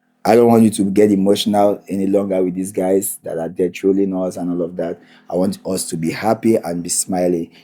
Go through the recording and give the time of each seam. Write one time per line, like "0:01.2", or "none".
none